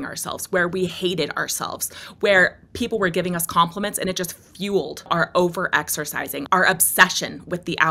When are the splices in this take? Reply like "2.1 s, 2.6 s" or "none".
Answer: 5.1 s, 6.4 s

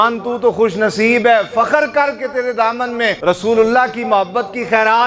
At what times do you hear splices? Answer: 3.2 s

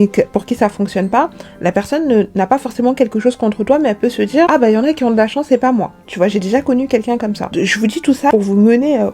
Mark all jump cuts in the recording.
none

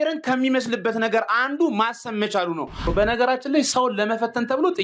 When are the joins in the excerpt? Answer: 2.8 s

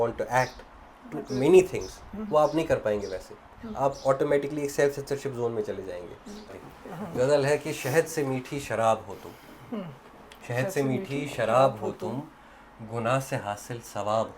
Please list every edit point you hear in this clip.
6.5 s

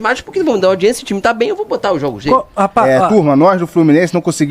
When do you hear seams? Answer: 2.9 s

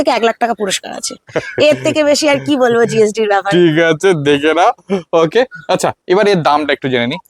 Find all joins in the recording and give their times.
none

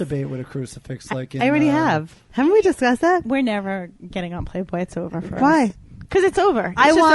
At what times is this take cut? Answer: 2.2 s

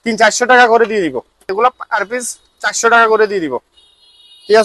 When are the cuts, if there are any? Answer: 1.4 s

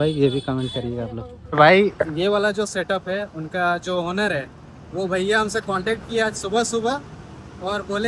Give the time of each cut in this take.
1.5 s

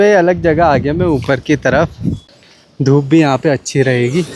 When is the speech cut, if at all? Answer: 2.3 s

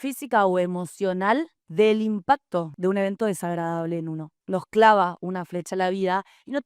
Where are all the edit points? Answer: 2.7 s, 4.3 s

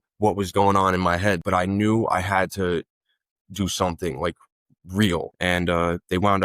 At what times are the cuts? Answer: 1.4 s, 5.3 s

